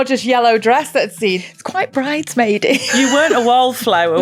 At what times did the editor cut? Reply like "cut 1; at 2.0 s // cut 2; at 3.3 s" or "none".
cut 1; at 1.4 s // cut 2; at 2.9 s